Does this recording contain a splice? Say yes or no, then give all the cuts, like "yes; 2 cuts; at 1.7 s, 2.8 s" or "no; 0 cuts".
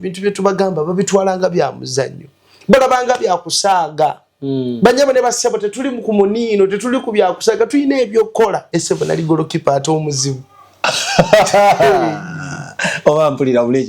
yes; 1 cut; at 8.6 s